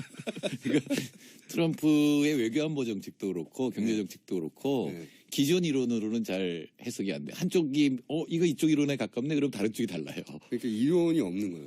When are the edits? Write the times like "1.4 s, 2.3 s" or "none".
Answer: 2.7 s

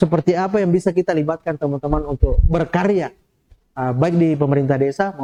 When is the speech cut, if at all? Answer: none

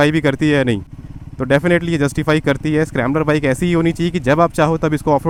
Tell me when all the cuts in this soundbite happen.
none

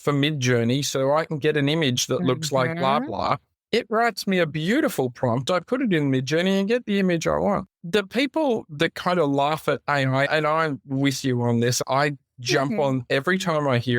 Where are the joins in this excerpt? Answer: 3.5 s, 7.7 s

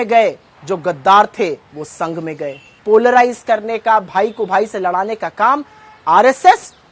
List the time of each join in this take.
2.7 s

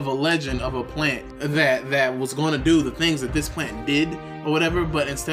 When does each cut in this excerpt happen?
1.3 s

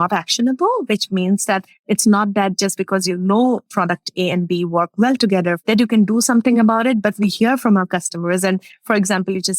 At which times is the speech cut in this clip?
3.7 s, 5.6 s

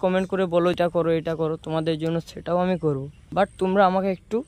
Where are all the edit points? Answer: 0.8 s, 3.1 s

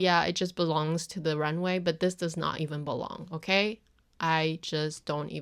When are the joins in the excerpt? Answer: none

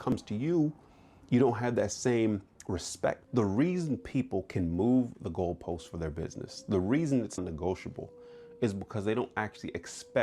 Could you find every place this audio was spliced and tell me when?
3.2 s, 7.4 s

